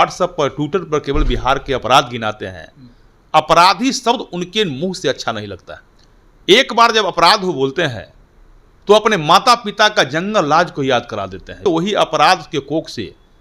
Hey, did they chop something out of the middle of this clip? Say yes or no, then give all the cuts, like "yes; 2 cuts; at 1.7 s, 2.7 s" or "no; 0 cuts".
yes; 1 cut; at 11.6 s